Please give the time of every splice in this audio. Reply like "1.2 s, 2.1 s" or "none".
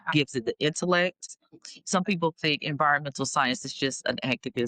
1.4 s